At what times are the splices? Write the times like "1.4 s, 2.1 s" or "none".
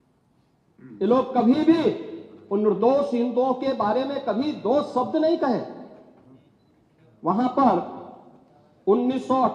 none